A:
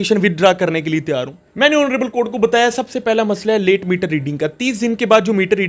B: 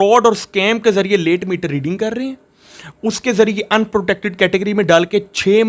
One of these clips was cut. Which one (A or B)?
A